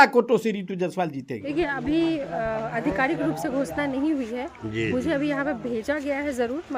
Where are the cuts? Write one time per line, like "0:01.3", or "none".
0:01.4